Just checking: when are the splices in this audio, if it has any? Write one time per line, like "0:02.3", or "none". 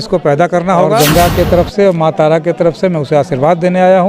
0:01.0